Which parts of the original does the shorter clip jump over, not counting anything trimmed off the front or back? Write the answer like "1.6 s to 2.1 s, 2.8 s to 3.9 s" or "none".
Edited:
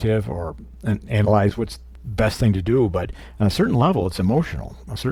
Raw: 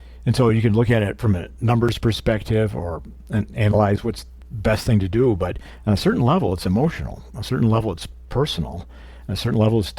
none